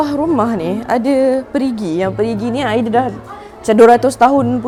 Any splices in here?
no; 0 cuts

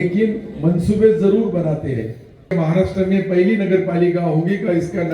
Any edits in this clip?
yes; 1 cut; at 2.5 s

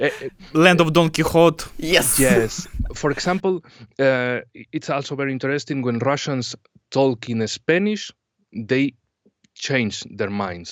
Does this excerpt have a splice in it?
no; 0 cuts

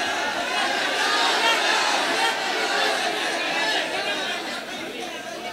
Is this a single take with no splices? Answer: yes; 0 cuts

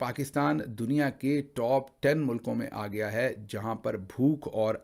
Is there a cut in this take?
no; 0 cuts

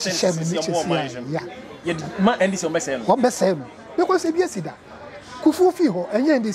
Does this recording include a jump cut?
no; 0 cuts

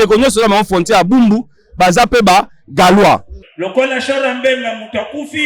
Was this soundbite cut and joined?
yes; 1 cut; at 3.4 s

